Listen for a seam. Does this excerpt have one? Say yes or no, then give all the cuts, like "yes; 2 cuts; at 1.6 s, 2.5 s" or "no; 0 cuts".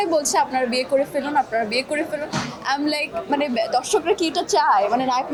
no; 0 cuts